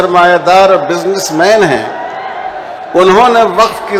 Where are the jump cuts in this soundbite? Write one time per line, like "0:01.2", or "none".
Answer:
none